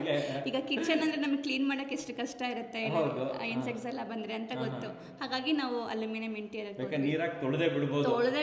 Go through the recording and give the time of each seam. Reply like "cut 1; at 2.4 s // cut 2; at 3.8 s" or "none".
none